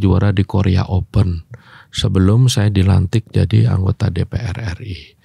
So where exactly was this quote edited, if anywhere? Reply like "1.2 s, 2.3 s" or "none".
none